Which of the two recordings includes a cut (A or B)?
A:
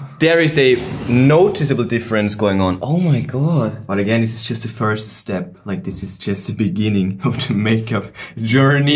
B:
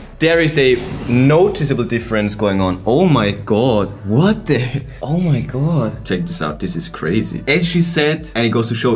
A